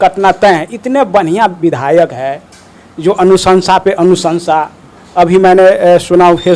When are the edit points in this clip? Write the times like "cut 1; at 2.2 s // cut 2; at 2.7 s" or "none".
none